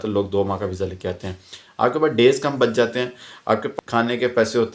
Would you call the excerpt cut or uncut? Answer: cut